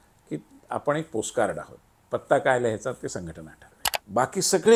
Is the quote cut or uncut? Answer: cut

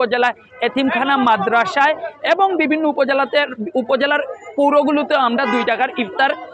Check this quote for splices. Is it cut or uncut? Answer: uncut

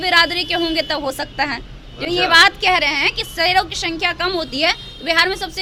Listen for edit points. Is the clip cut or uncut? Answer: uncut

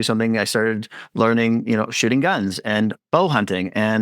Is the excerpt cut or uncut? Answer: cut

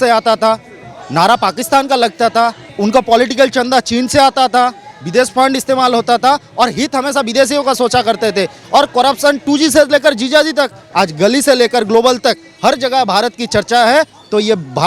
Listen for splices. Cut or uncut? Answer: cut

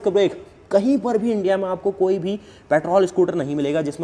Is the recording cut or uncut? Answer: uncut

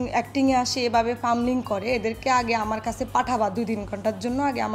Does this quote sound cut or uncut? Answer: uncut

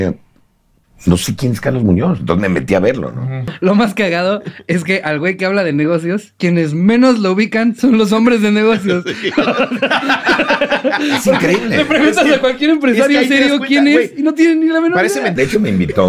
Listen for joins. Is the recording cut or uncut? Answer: cut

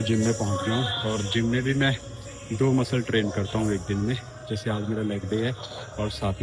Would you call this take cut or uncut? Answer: uncut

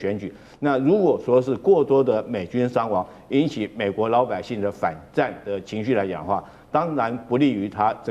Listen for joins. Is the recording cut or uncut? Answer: uncut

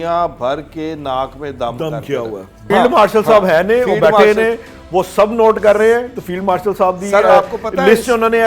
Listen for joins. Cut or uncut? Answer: cut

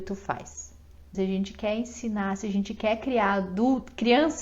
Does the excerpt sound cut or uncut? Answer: cut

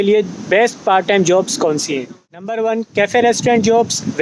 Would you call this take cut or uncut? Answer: cut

